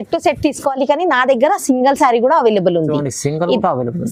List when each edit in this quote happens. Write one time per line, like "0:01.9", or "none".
none